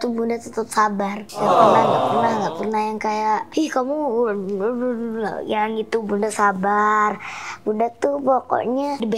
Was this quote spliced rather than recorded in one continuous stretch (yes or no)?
no